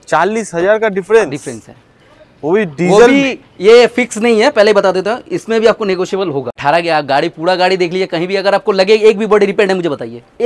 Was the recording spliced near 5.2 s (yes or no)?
no